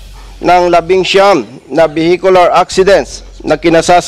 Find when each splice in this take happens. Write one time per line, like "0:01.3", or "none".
none

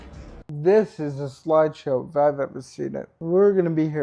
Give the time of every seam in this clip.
0:03.1

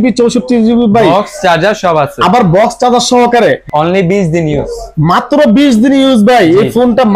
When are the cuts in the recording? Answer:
0:03.6

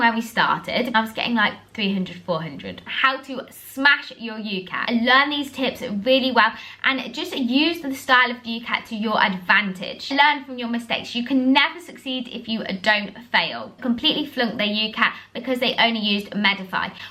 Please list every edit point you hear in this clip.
0:02.8
0:04.8
0:10.1
0:13.8

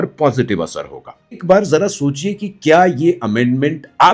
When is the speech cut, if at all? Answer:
0:01.4

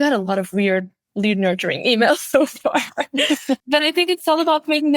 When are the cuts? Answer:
0:03.6

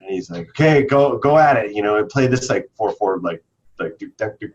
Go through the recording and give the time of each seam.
none

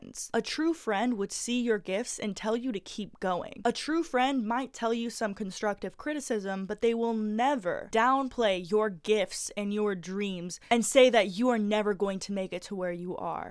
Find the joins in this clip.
0:03.5

